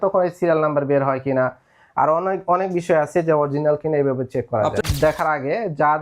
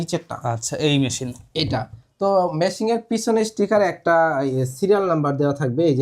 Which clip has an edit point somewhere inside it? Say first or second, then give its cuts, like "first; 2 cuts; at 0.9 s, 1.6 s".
first; 1 cut; at 4.8 s